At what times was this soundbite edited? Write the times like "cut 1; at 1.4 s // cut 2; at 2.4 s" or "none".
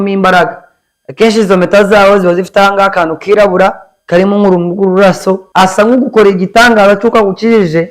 cut 1; at 3.9 s // cut 2; at 5.4 s